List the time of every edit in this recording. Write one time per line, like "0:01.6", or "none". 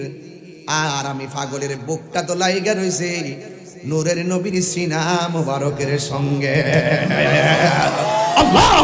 none